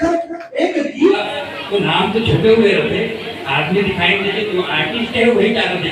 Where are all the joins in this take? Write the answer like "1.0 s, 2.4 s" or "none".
1.2 s